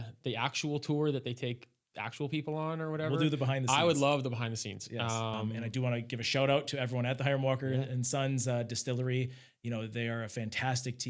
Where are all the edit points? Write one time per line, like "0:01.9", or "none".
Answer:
0:05.6

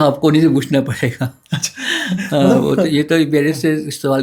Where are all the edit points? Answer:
none

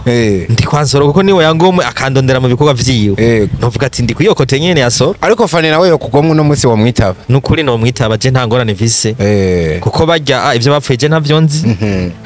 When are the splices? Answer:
none

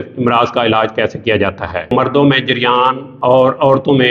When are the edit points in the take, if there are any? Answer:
0:01.9
0:03.1

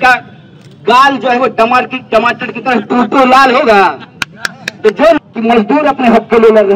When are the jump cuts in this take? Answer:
0:05.2

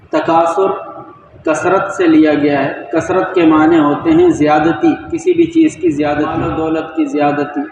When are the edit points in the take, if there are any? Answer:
0:06.5

